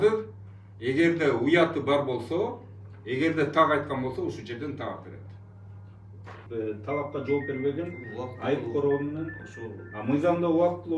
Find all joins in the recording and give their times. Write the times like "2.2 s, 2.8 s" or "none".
6.4 s